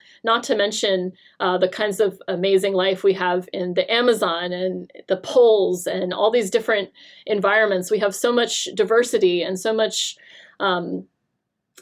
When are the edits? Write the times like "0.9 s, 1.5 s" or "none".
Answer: none